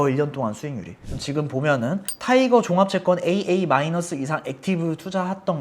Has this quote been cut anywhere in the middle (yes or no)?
yes